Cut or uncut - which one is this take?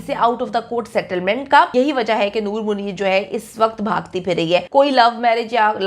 cut